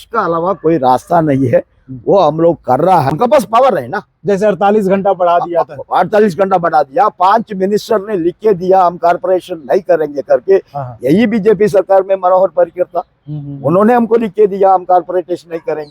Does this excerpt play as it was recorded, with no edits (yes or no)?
no